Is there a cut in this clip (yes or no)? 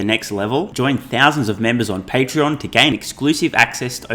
no